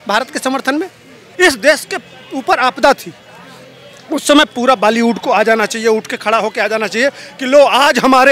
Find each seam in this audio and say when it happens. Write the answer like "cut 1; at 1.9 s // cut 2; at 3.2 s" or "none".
cut 1; at 1.2 s